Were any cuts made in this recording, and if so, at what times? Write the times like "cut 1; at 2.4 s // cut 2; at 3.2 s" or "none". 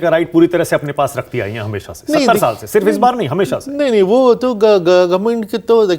none